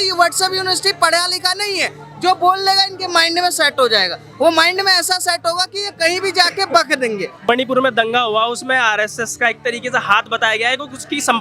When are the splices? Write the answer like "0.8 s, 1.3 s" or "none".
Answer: 7.5 s